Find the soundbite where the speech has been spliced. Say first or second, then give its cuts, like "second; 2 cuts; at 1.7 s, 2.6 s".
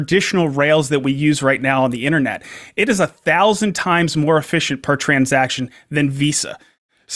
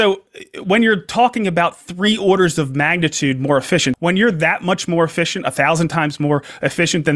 second; 1 cut; at 3.9 s